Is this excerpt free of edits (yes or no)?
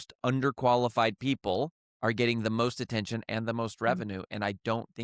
yes